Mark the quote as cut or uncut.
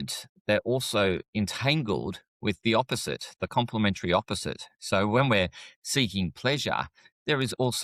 uncut